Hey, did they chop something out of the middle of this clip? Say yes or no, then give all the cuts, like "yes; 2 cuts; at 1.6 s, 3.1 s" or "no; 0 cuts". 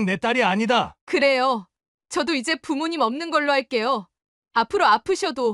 yes; 1 cut; at 1.0 s